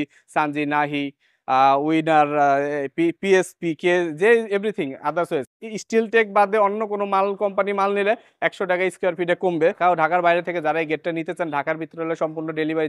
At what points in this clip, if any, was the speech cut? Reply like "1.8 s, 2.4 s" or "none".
9.8 s